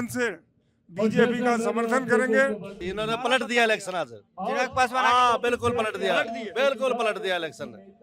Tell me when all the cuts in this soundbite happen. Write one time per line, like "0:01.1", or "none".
0:02.8